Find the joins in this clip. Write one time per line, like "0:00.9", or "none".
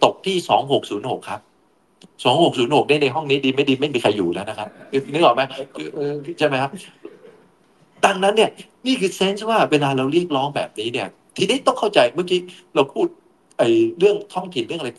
none

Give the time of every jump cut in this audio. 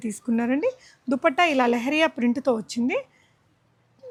none

